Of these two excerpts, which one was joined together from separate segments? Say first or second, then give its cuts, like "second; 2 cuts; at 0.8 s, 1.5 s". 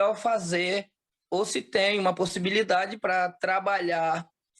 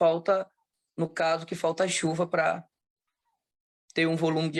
first; 1 cut; at 1.2 s